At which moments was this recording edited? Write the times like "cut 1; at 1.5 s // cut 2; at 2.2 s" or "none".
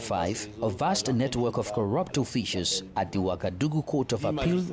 none